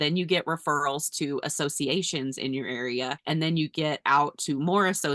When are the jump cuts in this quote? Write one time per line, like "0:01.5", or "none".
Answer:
0:03.2